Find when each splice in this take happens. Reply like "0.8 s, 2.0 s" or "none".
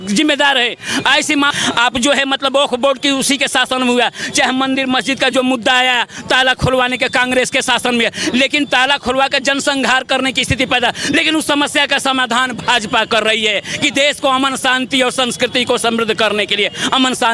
1.5 s